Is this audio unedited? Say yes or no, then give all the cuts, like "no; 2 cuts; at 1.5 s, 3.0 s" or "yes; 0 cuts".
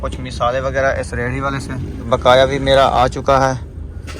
no; 1 cut; at 2.1 s